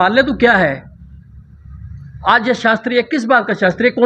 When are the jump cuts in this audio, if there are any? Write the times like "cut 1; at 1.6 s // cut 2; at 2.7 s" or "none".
none